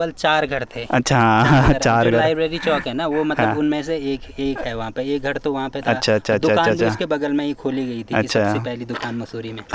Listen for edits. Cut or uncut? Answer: uncut